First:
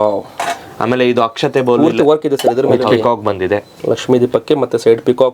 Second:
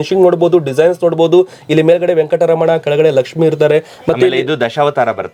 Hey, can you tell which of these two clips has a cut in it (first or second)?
first